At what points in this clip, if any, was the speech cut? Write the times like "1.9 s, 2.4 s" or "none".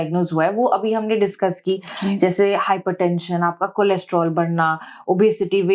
none